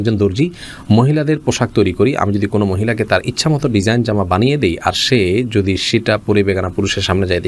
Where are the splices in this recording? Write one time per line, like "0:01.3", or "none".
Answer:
none